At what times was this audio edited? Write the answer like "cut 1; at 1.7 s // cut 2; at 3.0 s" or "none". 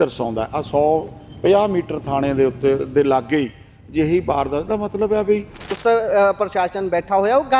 cut 1; at 5.7 s